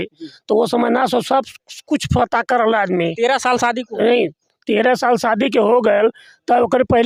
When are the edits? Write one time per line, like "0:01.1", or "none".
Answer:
none